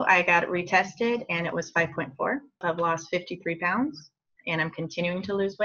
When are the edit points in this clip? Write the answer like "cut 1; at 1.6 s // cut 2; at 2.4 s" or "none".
cut 1; at 2.6 s